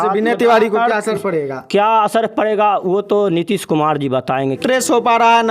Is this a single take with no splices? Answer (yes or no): no